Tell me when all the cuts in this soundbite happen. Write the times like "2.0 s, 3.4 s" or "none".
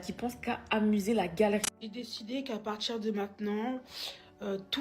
1.6 s

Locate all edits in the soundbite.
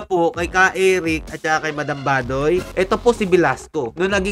2.7 s

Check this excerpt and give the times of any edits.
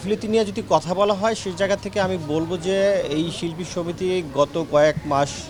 none

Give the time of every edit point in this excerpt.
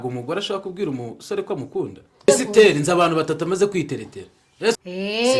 2.3 s

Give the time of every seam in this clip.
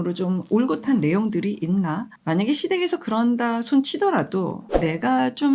2.1 s, 4.6 s

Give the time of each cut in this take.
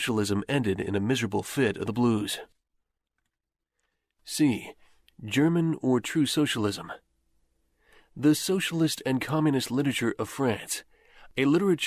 10.6 s

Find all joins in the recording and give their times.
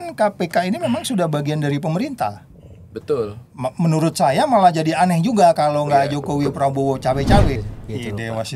7.6 s

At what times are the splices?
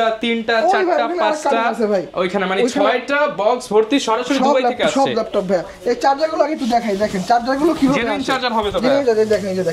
none

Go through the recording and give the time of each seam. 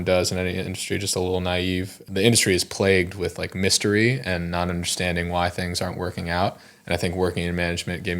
2.0 s

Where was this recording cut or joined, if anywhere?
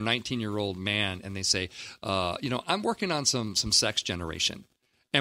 none

